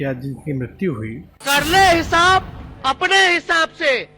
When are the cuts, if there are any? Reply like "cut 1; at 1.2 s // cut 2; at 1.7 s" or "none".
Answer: cut 1; at 1.4 s